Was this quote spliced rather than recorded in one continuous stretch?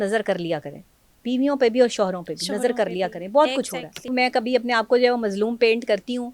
yes; 1 cut; at 4.1 s

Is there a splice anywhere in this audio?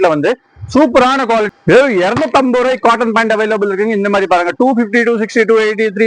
yes; 1 cut; at 1.5 s

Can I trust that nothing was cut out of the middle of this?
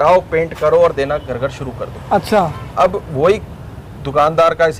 yes; 0 cuts

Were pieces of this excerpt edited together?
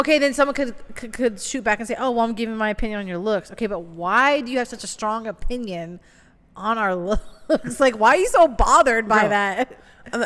no; 0 cuts

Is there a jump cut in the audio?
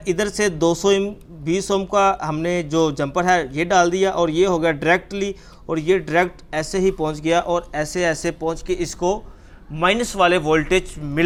no; 0 cuts

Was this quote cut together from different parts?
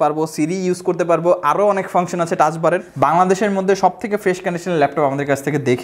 yes; 1 cut; at 2.9 s

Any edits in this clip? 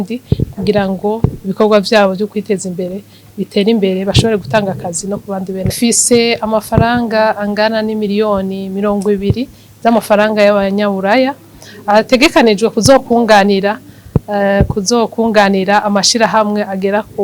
yes; 1 cut; at 5.7 s

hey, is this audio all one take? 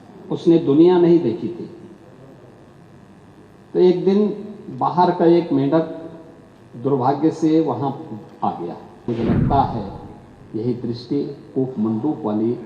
no; 1 cut; at 9.1 s

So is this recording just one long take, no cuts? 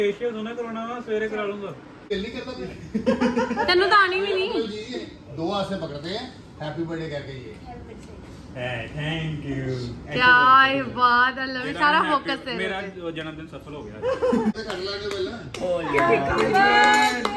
no; 2 cuts; at 2.1 s, 14.5 s

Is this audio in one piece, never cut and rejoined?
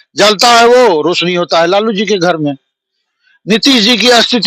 yes; 0 cuts

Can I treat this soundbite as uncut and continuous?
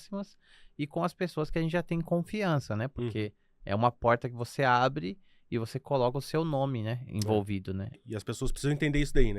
no; 1 cut; at 8.0 s

